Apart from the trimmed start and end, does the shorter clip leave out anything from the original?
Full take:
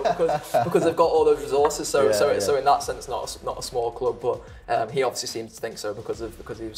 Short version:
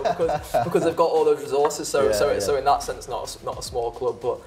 no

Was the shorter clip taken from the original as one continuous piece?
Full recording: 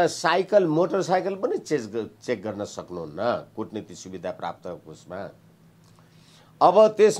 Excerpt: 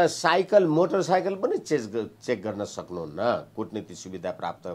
yes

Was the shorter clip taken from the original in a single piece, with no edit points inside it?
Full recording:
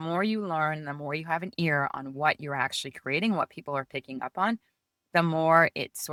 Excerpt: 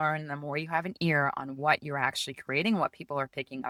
yes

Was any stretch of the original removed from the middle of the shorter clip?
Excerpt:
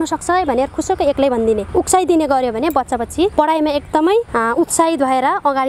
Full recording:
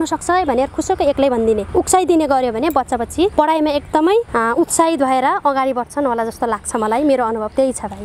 no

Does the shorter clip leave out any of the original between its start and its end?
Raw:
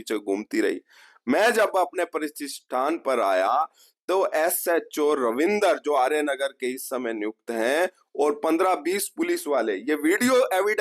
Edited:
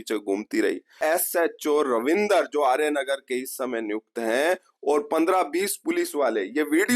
yes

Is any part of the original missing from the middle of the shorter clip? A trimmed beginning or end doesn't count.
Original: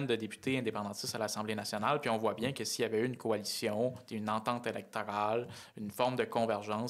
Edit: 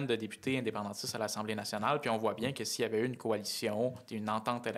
no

